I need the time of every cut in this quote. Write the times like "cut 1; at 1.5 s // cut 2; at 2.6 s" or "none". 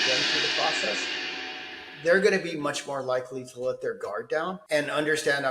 cut 1; at 4.6 s